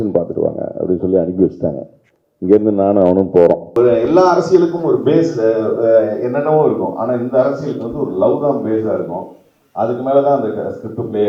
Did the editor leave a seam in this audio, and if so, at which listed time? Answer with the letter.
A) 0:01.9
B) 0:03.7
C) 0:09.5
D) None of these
B